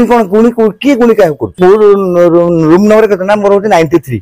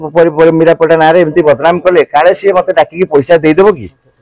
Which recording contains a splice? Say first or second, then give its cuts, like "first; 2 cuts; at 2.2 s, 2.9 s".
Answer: first; 1 cut; at 1.6 s